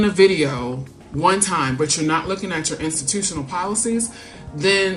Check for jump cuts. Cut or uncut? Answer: uncut